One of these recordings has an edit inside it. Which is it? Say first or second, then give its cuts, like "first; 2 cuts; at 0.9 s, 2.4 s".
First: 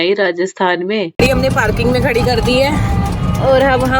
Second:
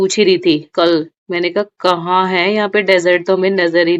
first; 1 cut; at 1.2 s